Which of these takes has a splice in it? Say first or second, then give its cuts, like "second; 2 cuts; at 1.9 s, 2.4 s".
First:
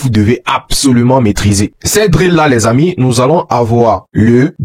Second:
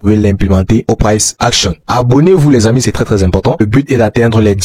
second; 1 cut; at 3.5 s